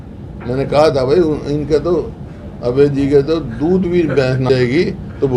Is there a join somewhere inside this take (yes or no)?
yes